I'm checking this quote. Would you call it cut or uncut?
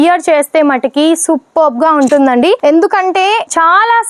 uncut